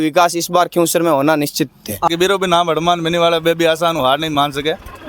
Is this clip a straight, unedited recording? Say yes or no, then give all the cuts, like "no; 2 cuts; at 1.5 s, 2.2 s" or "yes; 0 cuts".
no; 1 cut; at 2.1 s